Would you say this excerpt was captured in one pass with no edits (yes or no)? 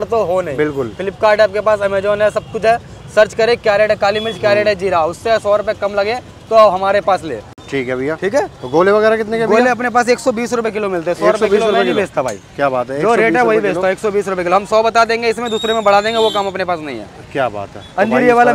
yes